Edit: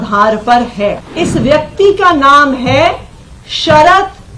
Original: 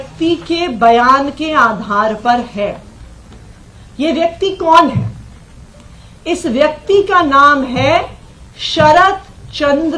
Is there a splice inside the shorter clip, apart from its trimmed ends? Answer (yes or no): yes